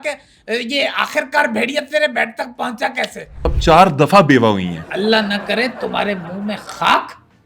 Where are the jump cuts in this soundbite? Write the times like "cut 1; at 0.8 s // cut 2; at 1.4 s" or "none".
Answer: cut 1; at 3.5 s